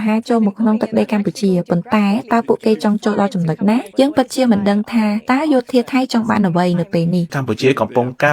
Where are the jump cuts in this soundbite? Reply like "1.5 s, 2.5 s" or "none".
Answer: 3.9 s, 7.3 s